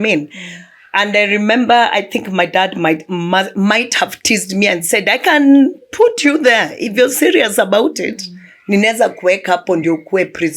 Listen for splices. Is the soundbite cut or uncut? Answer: uncut